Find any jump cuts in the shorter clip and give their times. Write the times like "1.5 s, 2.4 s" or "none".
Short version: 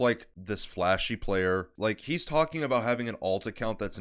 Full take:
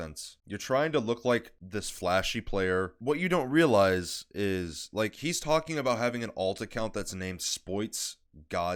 1.7 s